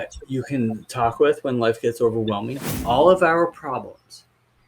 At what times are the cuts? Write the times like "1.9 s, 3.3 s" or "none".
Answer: 2.6 s